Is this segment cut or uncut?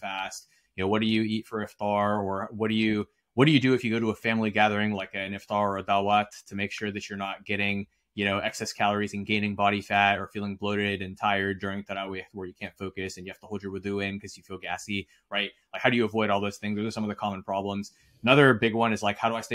uncut